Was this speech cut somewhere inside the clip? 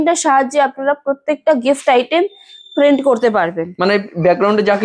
no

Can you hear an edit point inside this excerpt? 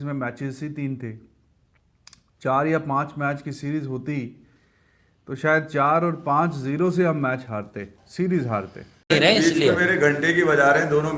yes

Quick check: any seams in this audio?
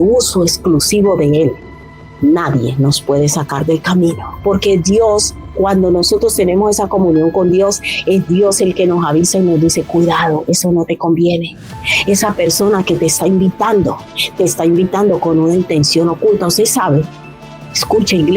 yes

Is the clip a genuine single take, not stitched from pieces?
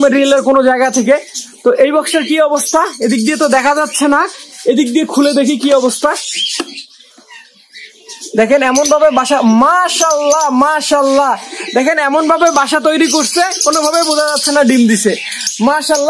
yes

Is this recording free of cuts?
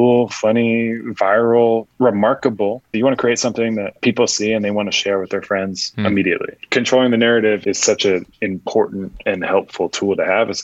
no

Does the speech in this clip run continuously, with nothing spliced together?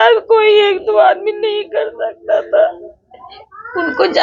yes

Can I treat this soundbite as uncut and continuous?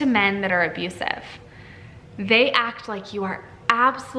yes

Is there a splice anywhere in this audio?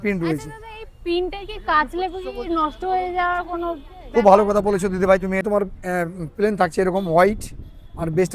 yes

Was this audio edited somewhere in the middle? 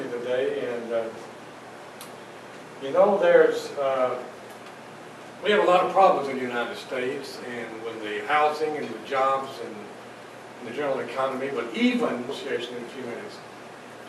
no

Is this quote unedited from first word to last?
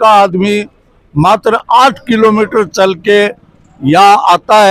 yes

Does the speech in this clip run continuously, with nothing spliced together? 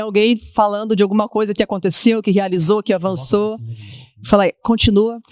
yes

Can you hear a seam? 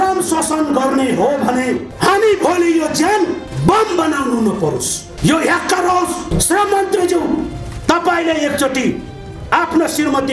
yes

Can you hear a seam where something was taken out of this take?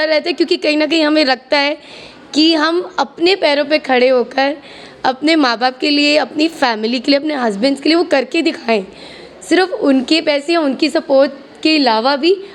no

